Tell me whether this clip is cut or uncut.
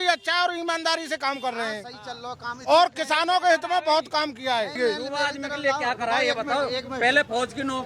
uncut